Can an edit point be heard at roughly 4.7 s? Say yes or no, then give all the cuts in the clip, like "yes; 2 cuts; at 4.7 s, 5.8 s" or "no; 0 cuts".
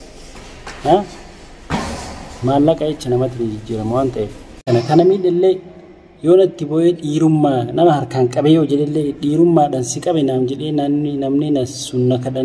yes; 1 cut; at 4.7 s